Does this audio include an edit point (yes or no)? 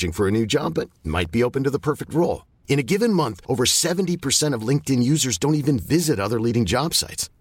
no